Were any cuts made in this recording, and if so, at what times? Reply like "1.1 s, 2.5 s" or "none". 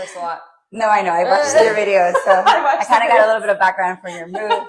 none